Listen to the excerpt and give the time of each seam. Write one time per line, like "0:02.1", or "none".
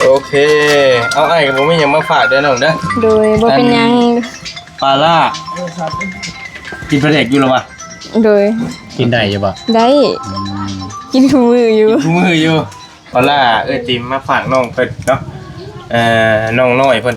0:13.1